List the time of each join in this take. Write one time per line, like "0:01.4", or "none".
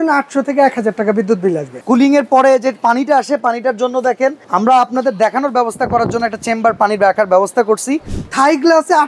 0:01.8
0:04.4
0:08.2